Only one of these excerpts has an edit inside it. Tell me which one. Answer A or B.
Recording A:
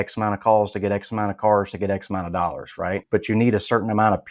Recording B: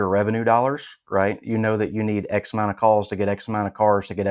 A